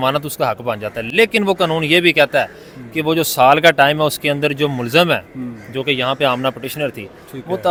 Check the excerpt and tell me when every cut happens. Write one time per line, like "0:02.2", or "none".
none